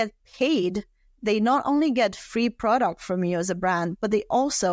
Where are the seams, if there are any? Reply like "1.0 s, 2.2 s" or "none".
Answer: none